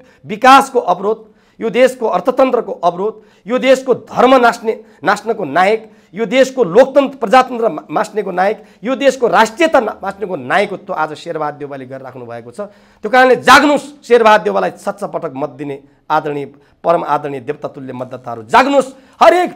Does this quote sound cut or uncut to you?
uncut